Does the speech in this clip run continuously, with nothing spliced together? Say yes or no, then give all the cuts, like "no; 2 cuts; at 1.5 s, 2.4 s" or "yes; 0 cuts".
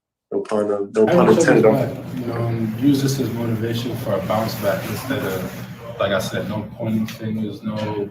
no; 1 cut; at 1.7 s